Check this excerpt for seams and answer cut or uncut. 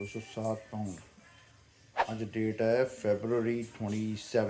uncut